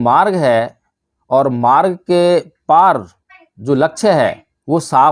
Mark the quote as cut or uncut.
uncut